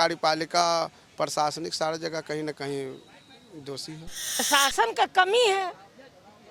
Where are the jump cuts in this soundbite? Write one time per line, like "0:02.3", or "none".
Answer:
0:04.4